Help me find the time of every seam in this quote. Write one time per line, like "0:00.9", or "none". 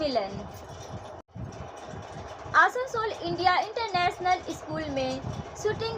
0:01.3